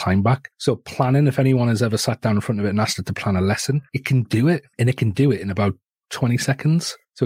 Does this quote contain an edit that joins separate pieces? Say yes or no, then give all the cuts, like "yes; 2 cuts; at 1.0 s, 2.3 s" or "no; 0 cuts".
no; 0 cuts